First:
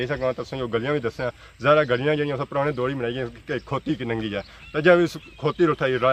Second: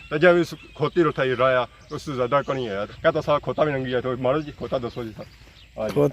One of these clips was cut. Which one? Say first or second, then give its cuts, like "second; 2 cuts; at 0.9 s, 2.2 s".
second; 1 cut; at 2.9 s